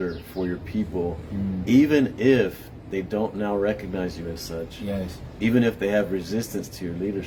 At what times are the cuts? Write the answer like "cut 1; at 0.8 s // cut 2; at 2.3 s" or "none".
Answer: none